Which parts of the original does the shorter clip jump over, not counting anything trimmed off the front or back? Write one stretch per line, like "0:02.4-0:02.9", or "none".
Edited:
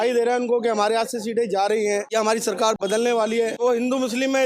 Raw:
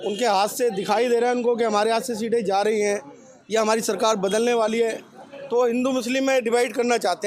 0:03.0-0:03.5
0:05.0-0:05.5